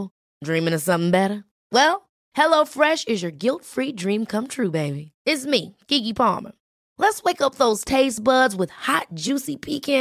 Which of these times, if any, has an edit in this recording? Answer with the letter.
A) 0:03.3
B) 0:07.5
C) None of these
C